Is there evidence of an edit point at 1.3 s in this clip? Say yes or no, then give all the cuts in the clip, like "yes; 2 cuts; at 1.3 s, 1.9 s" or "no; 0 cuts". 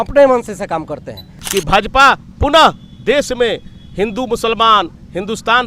yes; 1 cut; at 1.3 s